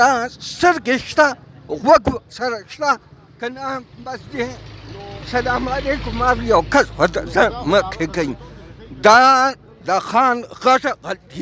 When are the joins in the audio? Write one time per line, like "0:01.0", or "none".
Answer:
none